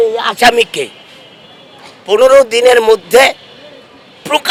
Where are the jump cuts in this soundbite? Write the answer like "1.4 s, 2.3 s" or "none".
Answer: none